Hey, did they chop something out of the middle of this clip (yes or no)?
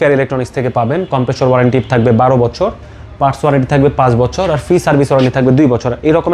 no